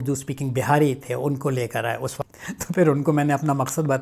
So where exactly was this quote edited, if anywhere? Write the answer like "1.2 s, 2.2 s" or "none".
2.1 s